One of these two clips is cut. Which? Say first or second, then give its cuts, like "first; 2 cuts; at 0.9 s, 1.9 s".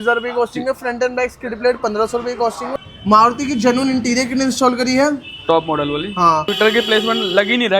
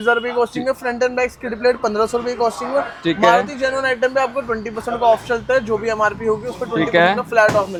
first; 2 cuts; at 2.7 s, 6.5 s